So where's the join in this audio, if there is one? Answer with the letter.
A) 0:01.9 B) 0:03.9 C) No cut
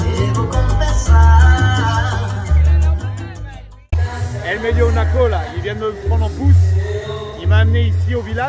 B